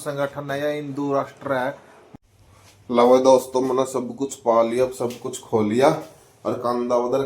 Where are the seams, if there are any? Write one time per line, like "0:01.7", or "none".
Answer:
0:02.0